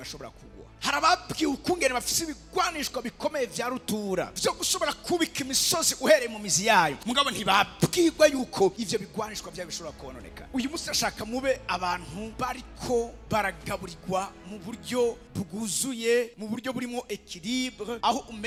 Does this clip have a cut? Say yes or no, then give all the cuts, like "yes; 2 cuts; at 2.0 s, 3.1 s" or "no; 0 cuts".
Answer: no; 0 cuts